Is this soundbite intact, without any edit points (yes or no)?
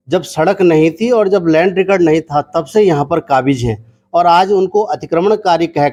yes